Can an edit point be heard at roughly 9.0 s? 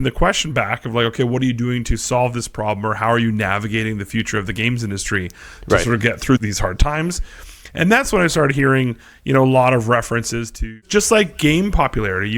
no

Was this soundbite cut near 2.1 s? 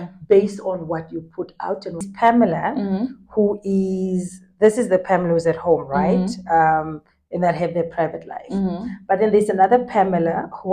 yes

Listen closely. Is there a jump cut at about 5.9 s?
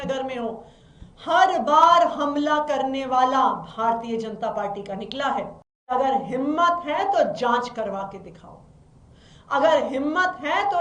yes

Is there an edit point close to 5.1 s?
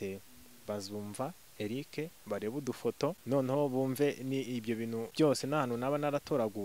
yes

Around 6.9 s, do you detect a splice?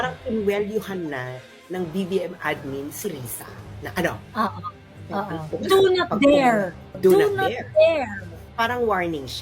yes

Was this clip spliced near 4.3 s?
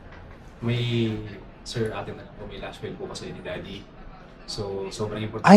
no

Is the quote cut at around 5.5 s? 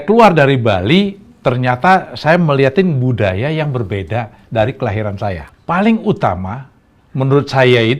yes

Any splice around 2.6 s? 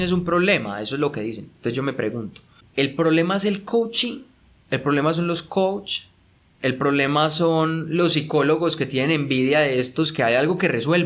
yes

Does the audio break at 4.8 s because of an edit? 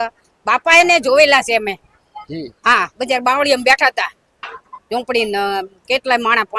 no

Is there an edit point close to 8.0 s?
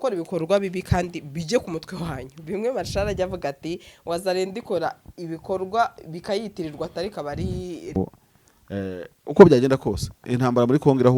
yes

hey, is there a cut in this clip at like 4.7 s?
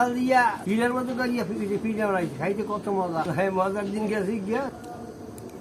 yes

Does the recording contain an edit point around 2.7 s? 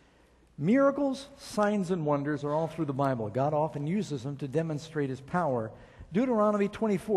yes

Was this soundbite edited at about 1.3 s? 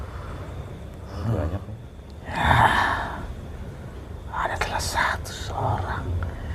yes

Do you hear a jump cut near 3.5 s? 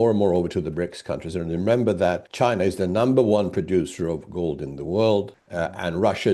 no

